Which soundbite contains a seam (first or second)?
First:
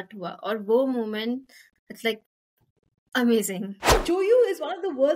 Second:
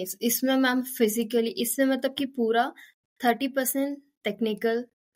first